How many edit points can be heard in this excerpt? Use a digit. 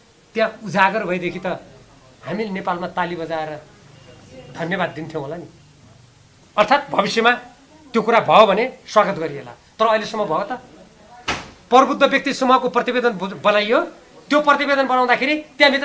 0